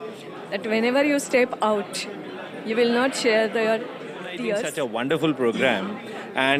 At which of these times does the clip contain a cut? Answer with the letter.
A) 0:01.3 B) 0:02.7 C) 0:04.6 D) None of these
C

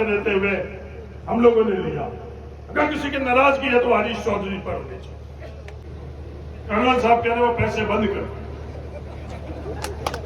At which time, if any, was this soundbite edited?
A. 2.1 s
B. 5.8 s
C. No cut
B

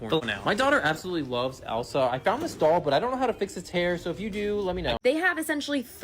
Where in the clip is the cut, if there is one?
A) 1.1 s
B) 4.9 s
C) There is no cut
B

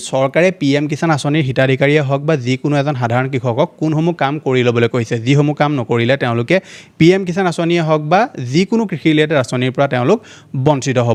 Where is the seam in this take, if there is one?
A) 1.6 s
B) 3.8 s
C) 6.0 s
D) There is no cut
D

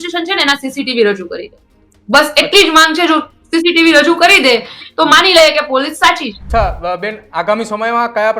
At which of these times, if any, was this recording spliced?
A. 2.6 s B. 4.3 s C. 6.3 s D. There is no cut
C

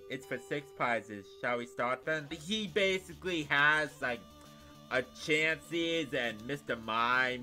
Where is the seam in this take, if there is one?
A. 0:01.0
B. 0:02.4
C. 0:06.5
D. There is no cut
B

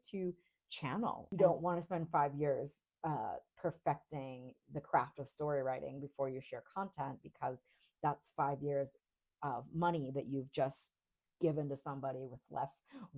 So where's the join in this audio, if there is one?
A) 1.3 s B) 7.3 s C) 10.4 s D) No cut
A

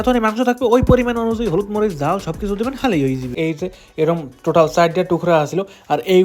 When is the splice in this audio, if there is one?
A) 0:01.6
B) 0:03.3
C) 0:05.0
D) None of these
B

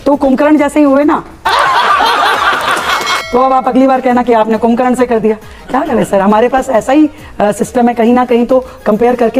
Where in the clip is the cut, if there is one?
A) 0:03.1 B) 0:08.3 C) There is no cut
C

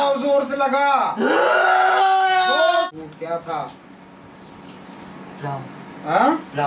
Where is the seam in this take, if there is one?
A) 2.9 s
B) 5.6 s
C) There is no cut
A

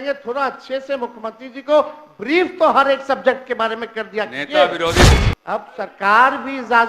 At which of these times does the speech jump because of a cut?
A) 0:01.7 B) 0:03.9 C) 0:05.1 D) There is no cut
C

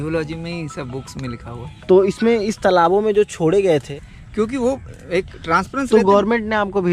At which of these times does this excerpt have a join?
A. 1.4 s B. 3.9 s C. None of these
B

